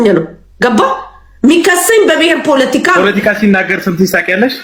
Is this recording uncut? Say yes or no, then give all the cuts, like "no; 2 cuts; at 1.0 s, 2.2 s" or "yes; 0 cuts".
yes; 0 cuts